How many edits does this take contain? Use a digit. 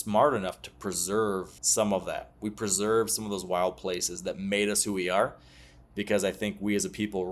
1